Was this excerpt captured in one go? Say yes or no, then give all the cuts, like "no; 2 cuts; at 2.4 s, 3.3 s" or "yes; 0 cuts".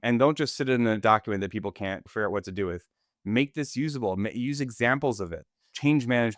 no; 1 cut; at 1.0 s